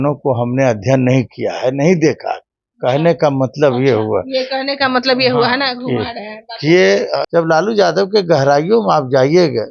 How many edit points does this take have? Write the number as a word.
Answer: one